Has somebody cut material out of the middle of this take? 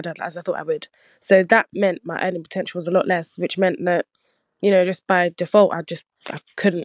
no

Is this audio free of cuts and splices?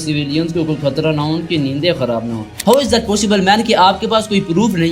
no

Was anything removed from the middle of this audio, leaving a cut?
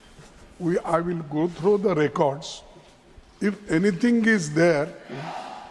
no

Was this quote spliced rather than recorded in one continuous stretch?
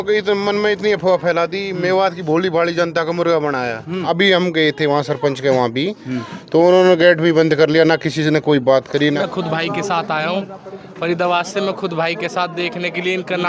yes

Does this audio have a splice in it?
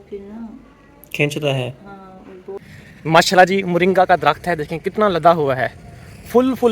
yes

